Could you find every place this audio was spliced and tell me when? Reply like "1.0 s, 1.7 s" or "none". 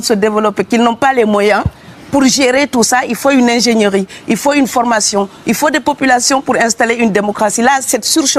none